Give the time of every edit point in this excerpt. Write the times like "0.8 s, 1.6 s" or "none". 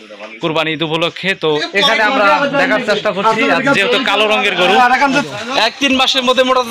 1.7 s, 5.2 s